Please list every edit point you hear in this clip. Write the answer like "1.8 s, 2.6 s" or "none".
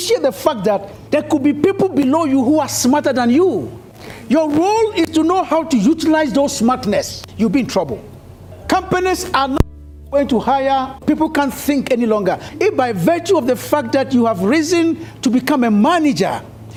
none